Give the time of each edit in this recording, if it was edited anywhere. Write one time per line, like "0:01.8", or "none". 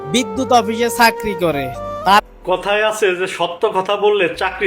0:02.2

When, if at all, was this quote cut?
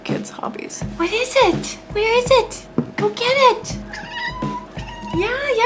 0:04.7

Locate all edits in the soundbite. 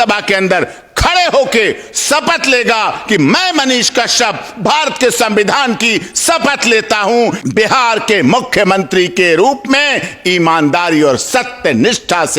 0:07.4

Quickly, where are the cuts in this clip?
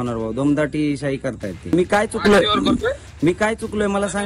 0:01.7

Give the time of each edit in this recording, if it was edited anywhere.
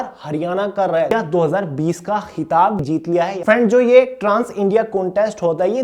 0:01.1
0:02.9

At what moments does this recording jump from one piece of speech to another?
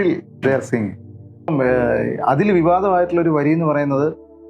0:01.5

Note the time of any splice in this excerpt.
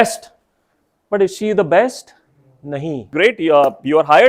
0:03.1

